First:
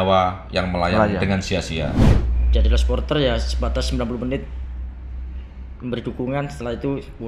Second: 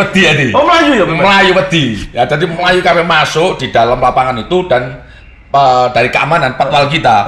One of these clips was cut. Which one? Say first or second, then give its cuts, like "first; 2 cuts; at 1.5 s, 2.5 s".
first; 1 cut; at 2.1 s